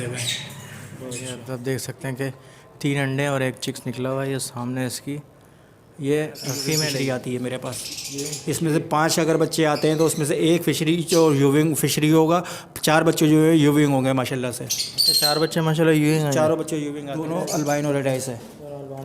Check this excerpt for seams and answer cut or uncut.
cut